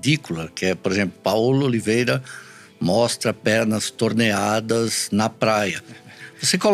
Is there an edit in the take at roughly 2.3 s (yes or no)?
no